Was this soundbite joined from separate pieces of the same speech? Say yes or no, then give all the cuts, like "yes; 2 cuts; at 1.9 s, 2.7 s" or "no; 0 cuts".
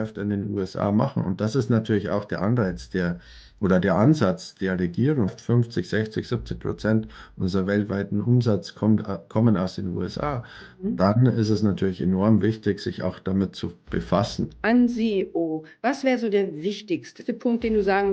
yes; 3 cuts; at 5.3 s, 14.5 s, 17.2 s